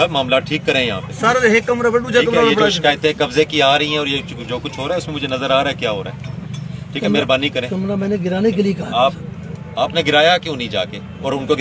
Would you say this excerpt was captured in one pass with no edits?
yes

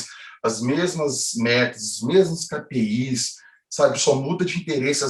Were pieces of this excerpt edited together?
no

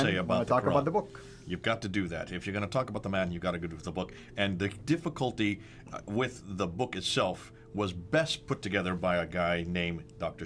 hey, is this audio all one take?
yes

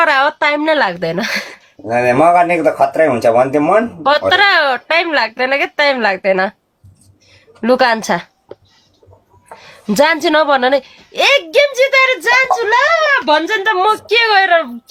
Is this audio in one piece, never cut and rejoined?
yes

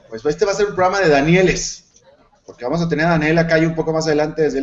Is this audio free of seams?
yes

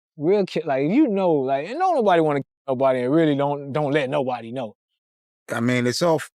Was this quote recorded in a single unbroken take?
no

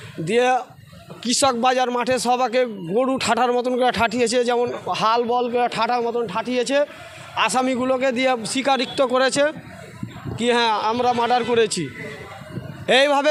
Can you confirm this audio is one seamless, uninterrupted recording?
yes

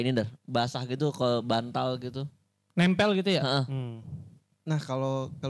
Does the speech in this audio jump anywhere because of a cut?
no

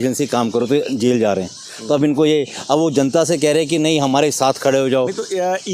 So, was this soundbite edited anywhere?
no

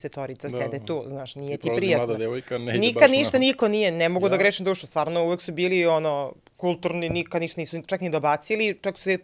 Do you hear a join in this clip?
no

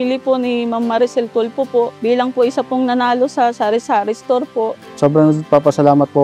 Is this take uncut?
no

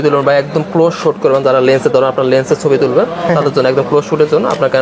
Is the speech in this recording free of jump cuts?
yes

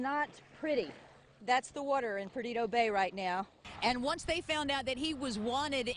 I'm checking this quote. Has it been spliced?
yes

